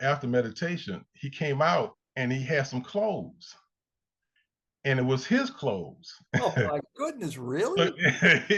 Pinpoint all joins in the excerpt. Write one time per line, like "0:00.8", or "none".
0:02.0